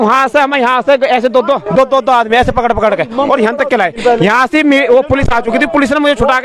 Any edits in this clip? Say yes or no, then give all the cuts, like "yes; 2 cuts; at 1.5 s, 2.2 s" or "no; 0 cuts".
no; 0 cuts